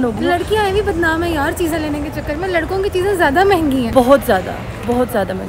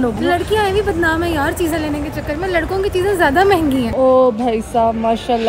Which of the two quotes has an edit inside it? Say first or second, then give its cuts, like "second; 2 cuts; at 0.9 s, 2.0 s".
second; 1 cut; at 3.9 s